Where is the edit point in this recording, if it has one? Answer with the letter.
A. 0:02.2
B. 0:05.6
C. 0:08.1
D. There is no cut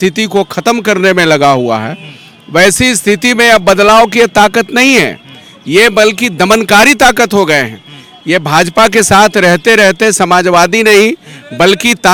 D